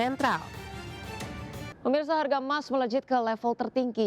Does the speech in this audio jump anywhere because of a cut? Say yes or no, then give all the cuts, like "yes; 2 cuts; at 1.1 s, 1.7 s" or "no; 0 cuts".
yes; 1 cut; at 1.7 s